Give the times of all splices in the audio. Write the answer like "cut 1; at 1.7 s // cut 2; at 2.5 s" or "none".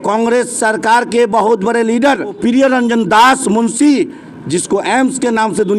cut 1; at 2.4 s // cut 2; at 4.3 s